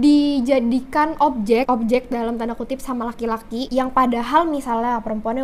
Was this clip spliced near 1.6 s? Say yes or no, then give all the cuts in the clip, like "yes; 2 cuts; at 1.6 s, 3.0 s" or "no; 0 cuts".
no; 0 cuts